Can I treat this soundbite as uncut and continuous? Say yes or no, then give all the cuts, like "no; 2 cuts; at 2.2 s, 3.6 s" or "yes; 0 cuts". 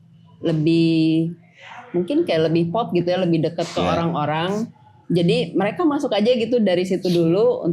yes; 0 cuts